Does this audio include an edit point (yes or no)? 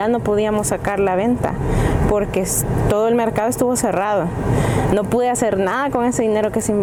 no